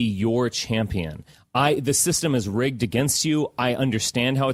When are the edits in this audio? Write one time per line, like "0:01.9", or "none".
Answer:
none